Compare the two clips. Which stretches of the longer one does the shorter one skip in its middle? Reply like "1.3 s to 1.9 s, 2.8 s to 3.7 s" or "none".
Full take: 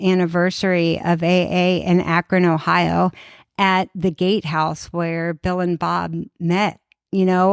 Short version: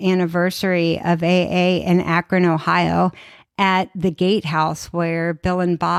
none